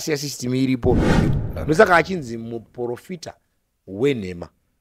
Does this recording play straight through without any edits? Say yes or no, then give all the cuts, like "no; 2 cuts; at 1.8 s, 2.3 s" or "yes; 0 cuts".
no; 1 cut; at 1.3 s